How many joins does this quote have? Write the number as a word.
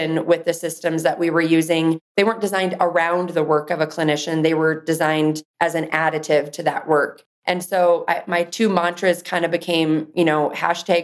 one